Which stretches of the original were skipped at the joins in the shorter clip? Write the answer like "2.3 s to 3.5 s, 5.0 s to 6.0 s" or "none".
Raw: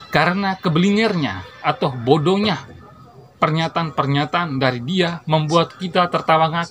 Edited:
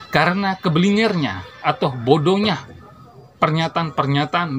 none